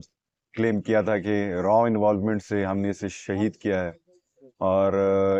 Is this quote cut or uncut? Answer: uncut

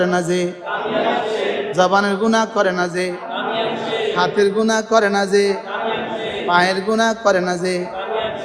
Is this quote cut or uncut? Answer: uncut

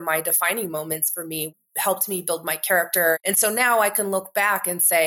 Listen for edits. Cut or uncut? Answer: cut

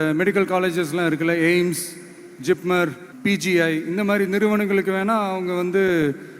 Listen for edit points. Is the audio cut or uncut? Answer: cut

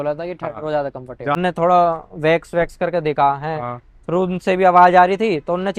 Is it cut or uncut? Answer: cut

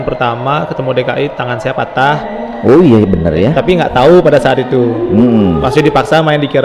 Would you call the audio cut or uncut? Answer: uncut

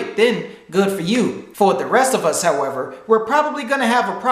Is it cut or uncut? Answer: cut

